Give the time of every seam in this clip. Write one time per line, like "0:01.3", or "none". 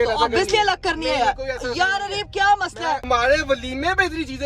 0:03.0